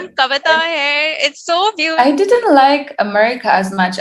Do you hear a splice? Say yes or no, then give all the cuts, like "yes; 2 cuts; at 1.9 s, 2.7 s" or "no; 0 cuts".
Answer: yes; 1 cut; at 1.8 s